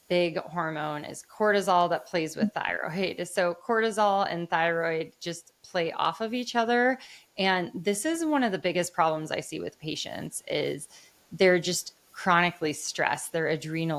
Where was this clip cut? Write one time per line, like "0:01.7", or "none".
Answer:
none